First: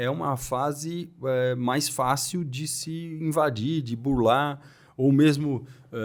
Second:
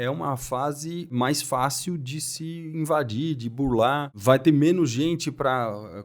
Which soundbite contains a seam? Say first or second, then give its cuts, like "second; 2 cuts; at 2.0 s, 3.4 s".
second; 2 cuts; at 1.1 s, 4.1 s